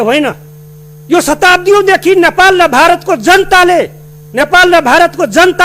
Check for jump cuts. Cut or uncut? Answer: uncut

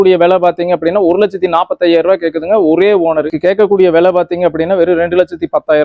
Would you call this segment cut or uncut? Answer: cut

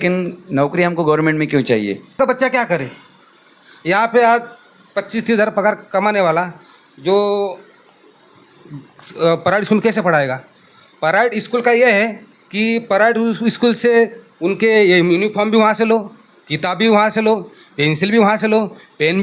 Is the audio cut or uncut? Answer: cut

